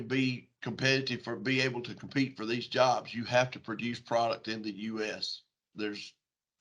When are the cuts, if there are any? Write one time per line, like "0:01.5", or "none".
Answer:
0:05.7